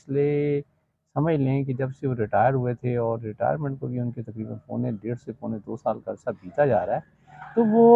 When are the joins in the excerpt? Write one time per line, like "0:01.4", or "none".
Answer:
none